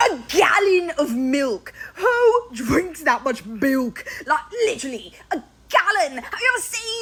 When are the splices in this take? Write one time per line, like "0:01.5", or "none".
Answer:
none